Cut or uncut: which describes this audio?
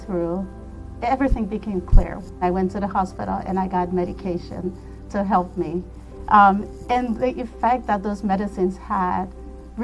cut